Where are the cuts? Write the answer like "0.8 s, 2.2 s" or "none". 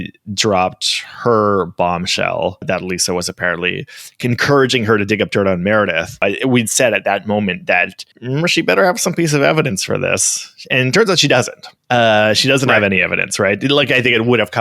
2.6 s, 6.2 s